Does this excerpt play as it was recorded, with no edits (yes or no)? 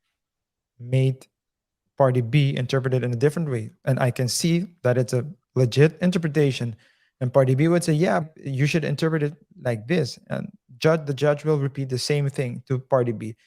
no